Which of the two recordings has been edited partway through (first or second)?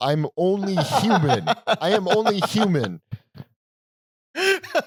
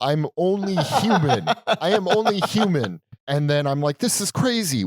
second